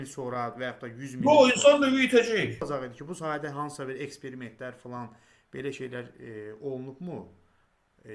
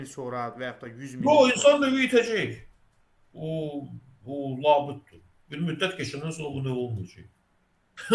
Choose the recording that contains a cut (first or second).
first